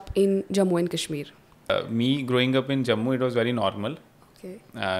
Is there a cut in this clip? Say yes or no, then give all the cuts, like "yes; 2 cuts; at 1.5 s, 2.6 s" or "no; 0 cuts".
yes; 1 cut; at 1.7 s